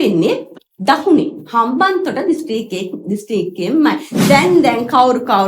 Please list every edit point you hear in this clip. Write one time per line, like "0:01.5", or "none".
0:04.1